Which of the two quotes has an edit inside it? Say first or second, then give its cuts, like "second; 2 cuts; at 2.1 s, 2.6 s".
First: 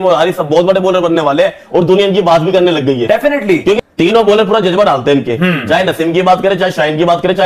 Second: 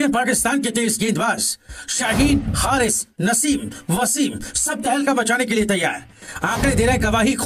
first; 1 cut; at 3.9 s